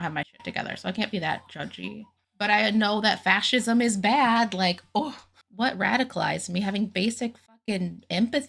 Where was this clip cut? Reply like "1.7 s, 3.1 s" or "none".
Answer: 5.2 s